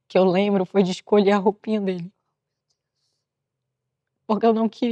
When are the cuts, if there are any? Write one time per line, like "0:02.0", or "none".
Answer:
none

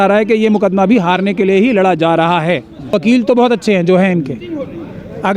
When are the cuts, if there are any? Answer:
0:02.9

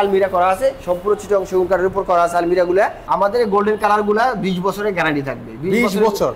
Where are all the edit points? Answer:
0:03.0

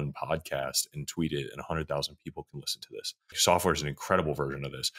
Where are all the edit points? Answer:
0:03.4

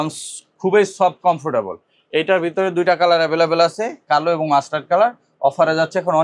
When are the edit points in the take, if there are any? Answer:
none

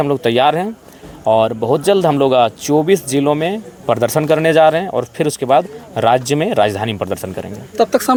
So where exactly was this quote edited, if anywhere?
none

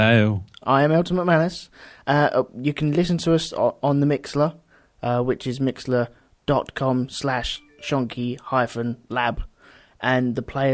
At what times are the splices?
none

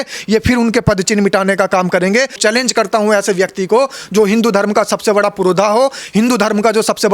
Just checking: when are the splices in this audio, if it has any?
0:02.4

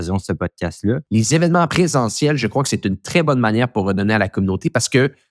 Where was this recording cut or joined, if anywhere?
0:01.0
0:01.7

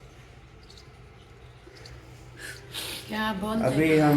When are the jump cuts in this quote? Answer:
0:01.7

